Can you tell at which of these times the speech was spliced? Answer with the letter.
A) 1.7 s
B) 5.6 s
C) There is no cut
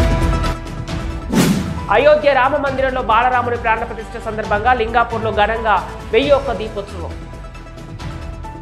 C